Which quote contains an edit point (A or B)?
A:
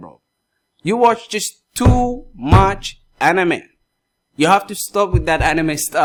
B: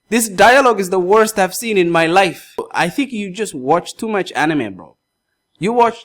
B